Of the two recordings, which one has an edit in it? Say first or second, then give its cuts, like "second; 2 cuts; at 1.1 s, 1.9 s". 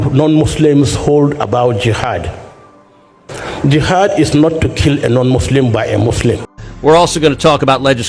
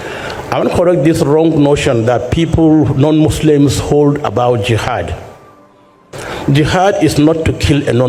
first; 1 cut; at 6.7 s